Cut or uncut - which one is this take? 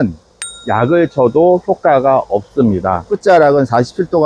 cut